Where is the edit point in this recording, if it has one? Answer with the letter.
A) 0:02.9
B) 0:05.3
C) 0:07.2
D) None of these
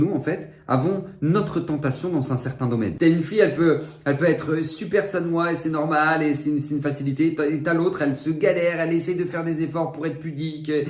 A